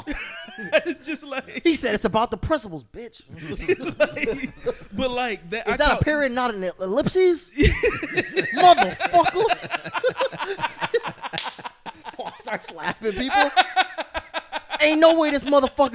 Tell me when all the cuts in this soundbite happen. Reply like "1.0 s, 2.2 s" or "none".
none